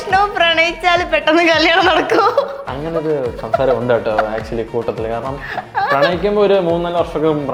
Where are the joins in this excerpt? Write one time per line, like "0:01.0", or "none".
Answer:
none